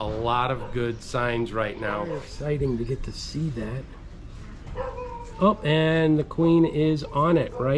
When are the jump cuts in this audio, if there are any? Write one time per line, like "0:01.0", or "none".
0:02.3